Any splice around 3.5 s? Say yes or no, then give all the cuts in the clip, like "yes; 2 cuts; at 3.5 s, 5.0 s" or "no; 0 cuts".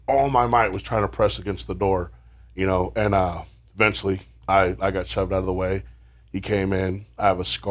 no; 0 cuts